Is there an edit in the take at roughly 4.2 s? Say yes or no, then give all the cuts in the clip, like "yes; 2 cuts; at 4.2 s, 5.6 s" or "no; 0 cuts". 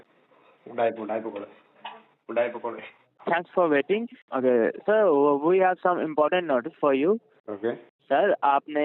yes; 1 cut; at 4.2 s